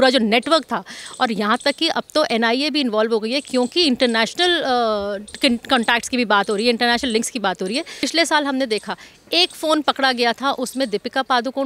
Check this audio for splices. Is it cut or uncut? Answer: cut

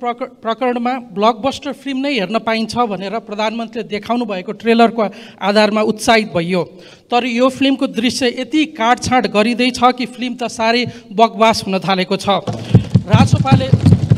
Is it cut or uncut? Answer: uncut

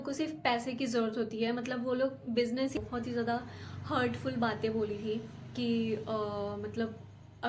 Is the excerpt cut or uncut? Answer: cut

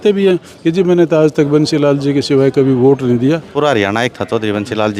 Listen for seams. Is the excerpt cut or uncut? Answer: cut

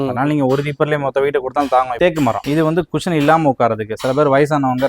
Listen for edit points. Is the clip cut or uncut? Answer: cut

